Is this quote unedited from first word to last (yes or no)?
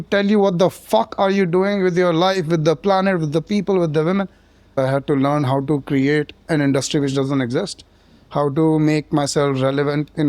no